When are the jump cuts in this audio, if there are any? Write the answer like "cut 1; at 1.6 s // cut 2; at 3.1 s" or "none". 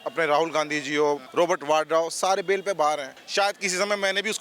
cut 1; at 1.2 s // cut 2; at 3.2 s